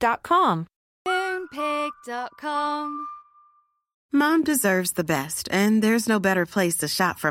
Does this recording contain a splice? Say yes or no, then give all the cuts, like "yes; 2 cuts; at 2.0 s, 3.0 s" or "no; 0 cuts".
yes; 1 cut; at 3.9 s